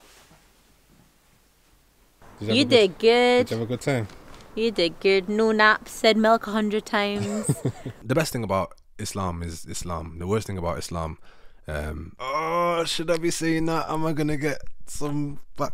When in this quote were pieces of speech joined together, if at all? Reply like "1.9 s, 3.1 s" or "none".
2.2 s, 7.9 s, 12.1 s